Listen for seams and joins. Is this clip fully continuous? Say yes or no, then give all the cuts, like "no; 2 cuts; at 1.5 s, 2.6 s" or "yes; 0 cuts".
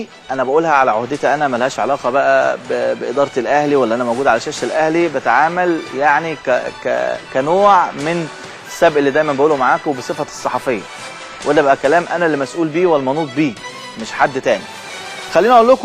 yes; 0 cuts